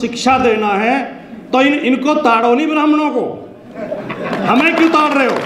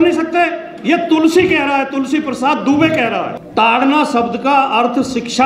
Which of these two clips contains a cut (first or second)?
second